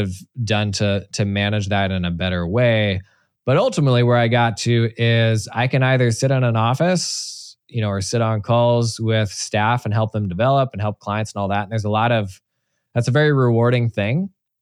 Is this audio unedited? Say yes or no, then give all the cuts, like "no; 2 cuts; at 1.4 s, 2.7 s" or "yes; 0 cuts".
yes; 0 cuts